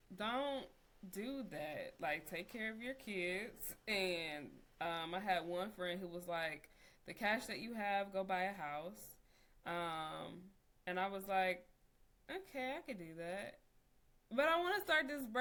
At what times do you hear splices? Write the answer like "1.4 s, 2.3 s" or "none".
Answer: none